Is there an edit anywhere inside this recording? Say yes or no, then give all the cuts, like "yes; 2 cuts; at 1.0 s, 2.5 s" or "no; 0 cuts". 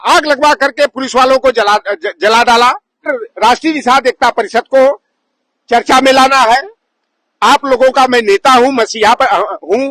yes; 1 cut; at 3.1 s